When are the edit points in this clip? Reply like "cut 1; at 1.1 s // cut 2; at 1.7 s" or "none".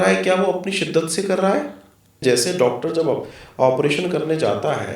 cut 1; at 2.2 s